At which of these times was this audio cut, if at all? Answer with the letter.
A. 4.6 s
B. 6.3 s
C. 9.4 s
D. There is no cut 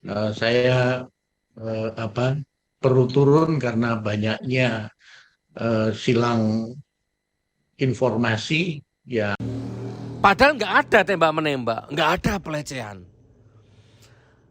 C